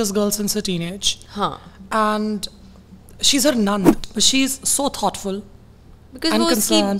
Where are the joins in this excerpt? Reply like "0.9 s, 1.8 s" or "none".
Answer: 4.0 s